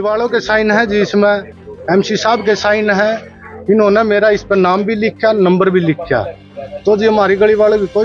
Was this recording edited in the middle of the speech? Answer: no; 0 cuts

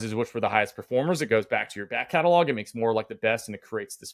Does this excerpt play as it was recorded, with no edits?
yes; 0 cuts

